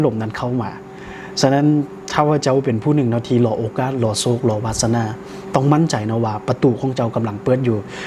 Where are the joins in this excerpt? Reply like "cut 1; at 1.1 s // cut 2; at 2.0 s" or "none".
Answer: none